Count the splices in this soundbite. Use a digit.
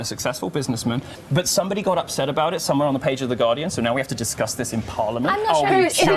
1